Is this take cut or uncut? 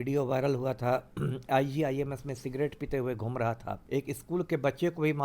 cut